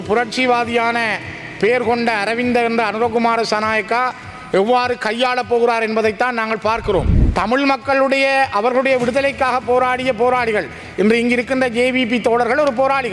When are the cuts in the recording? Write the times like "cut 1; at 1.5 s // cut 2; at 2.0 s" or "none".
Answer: cut 1; at 7.2 s